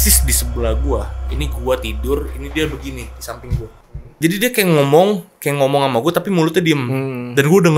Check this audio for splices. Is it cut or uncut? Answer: cut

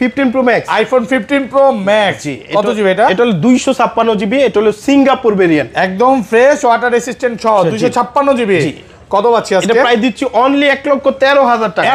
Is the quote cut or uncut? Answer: uncut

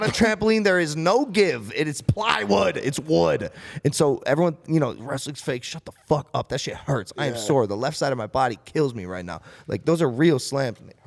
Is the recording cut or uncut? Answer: uncut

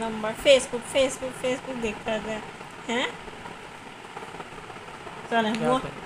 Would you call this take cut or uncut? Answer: cut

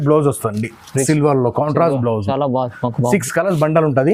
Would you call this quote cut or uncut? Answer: uncut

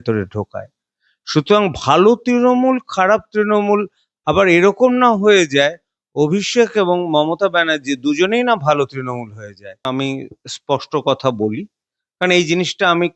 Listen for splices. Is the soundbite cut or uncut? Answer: cut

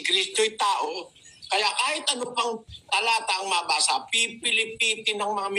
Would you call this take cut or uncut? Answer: uncut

